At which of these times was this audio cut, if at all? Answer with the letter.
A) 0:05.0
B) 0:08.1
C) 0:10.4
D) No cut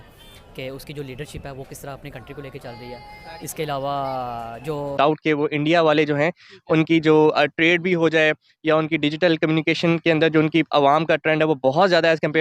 A